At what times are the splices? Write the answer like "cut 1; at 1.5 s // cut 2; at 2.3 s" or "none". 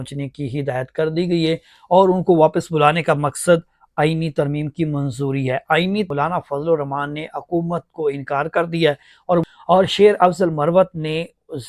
cut 1; at 6.1 s // cut 2; at 9.5 s